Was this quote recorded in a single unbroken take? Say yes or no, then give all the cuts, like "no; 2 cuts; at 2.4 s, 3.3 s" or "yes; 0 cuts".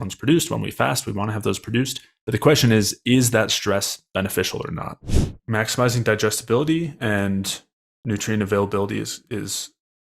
no; 1 cut; at 5.3 s